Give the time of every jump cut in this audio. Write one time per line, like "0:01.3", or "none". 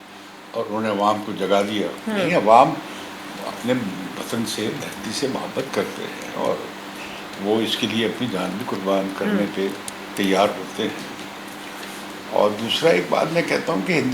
none